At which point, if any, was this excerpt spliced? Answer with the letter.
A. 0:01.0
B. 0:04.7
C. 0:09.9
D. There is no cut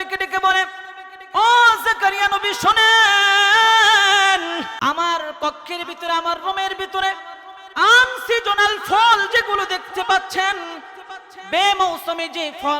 B